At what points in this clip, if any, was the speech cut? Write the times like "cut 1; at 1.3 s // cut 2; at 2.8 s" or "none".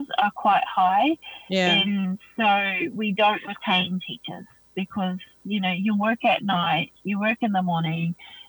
none

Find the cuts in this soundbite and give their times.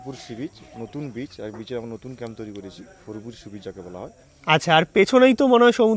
none

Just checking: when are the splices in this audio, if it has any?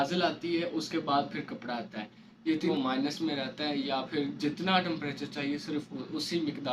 cut 1; at 2.7 s

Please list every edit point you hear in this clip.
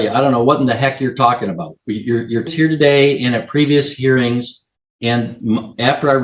cut 1; at 2.5 s

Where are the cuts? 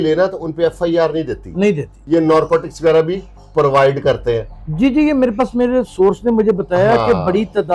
cut 1; at 1.9 s

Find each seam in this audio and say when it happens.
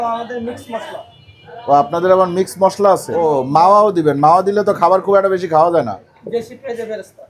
cut 1; at 3.1 s // cut 2; at 6.1 s

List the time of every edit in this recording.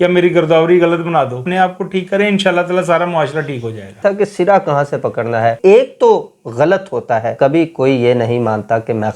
cut 1; at 1.4 s // cut 2; at 4.0 s // cut 3; at 5.6 s // cut 4; at 7.3 s

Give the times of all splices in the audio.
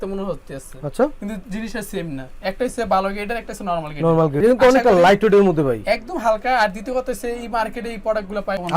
cut 1; at 4.4 s

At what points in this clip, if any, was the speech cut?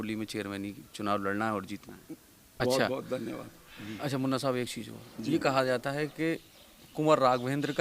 cut 1; at 2.6 s

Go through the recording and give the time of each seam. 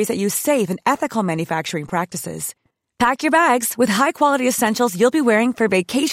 none

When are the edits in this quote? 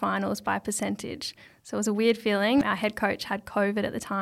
cut 1; at 2.6 s

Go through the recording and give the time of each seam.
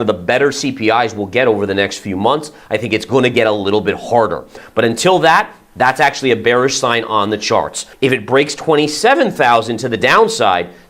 cut 1; at 4.5 s // cut 2; at 7.8 s

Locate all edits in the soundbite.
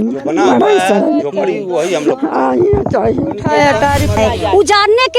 cut 1; at 4.1 s

